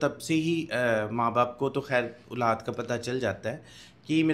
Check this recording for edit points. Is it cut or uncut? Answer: uncut